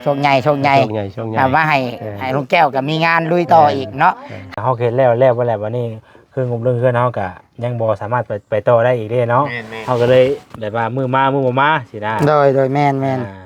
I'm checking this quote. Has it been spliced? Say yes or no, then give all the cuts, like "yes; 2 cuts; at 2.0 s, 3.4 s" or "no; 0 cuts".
yes; 1 cut; at 4.5 s